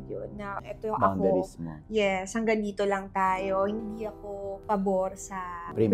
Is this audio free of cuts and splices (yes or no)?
yes